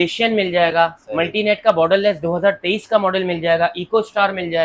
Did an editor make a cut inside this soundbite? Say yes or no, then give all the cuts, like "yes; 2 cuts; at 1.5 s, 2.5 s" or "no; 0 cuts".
no; 0 cuts